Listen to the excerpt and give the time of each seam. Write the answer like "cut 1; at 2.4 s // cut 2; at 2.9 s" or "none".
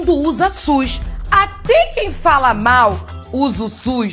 none